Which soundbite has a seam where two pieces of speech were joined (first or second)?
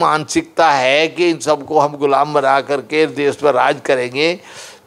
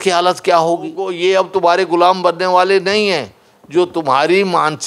second